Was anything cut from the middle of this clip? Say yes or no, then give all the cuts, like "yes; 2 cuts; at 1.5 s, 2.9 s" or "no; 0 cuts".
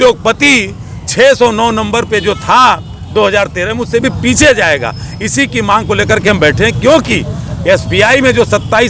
no; 0 cuts